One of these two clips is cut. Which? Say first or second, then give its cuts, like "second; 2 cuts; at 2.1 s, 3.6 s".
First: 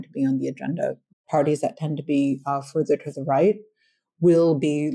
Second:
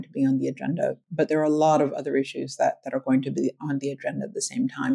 first; 1 cut; at 1.2 s